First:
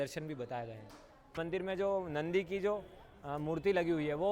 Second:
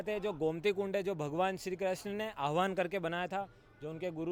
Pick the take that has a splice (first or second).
first